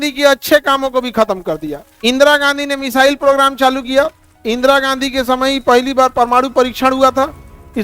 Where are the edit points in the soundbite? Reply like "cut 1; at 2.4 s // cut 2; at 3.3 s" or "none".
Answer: cut 1; at 1.8 s